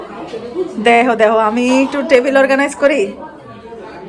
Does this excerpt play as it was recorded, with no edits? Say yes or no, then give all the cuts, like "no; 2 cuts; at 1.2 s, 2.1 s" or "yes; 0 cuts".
yes; 0 cuts